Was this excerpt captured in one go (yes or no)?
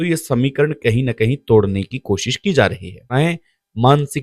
no